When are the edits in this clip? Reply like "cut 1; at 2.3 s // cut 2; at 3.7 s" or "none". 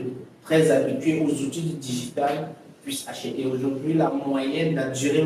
none